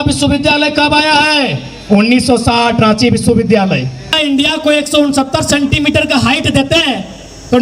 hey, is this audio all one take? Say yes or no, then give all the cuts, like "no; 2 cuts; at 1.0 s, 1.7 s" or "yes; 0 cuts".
no; 1 cut; at 4.2 s